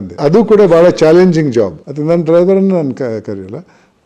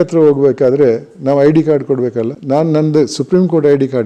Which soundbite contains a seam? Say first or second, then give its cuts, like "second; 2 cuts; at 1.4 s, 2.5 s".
first; 1 cut; at 1.8 s